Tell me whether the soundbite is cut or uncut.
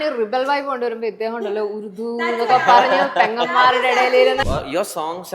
cut